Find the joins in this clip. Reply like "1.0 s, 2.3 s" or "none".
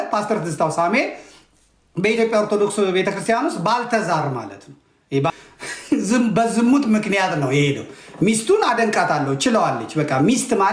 5.4 s